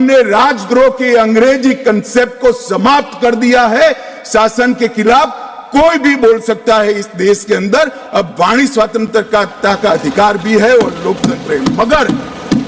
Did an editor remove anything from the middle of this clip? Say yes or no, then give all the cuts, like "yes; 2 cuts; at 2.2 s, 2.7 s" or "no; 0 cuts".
no; 0 cuts